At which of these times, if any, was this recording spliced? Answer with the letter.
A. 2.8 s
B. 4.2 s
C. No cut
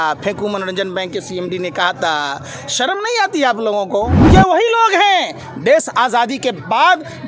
B